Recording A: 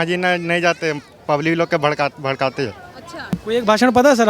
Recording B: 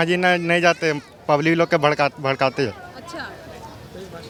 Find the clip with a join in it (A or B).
A